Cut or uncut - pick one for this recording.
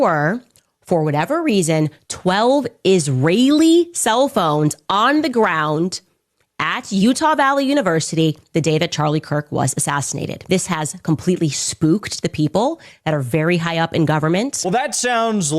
cut